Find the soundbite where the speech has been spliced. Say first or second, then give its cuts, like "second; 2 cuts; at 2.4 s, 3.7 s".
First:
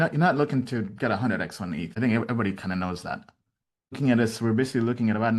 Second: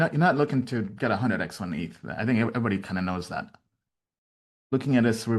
first; 2 cuts; at 1.9 s, 4.0 s